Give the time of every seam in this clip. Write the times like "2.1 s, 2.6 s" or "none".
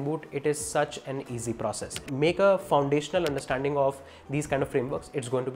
2.1 s